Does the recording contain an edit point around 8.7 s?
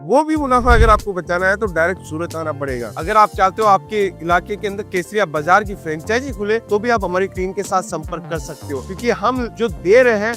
no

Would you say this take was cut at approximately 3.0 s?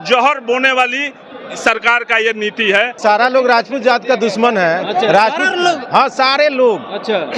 yes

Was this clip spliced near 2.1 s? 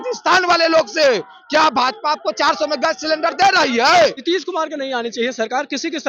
no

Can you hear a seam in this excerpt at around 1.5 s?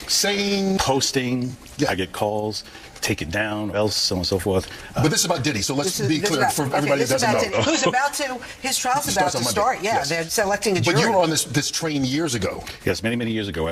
no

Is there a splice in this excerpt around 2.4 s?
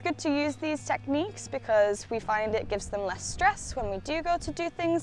no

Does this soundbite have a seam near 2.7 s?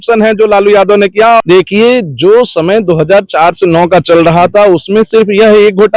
no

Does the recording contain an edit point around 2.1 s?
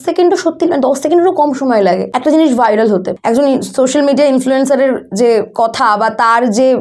yes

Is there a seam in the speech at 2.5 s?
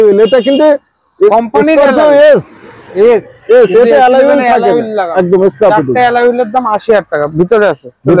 no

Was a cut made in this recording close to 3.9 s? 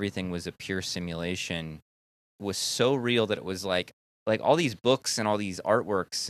yes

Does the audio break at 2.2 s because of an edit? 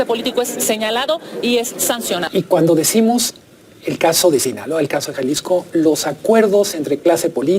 yes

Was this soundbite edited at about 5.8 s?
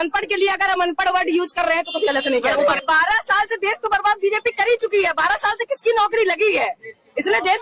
no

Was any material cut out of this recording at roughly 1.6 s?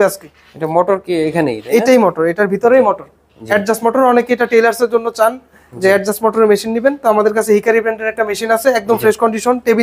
no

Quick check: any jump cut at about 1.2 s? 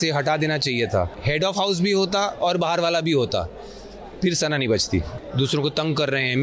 yes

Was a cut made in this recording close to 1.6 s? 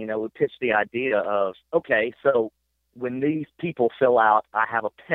yes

